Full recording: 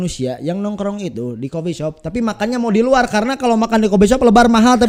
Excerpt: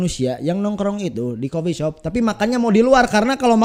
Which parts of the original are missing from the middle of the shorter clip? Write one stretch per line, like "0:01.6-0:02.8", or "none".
none